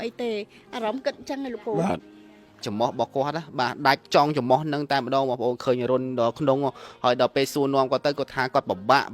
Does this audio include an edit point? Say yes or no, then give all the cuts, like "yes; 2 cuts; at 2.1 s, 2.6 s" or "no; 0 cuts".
yes; 1 cut; at 2.7 s